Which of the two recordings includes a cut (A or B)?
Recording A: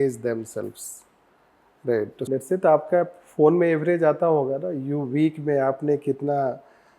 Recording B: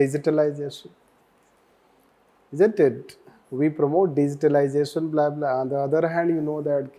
A